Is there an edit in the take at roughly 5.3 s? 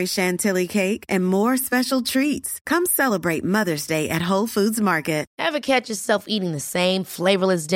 yes; 1 cut; at 5.3 s

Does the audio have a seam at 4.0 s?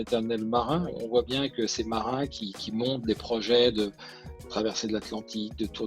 no; 0 cuts

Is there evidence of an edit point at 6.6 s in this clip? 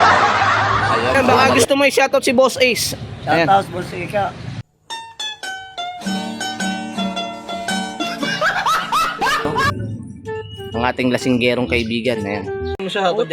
no; 2 cuts; at 1.2 s, 9.6 s

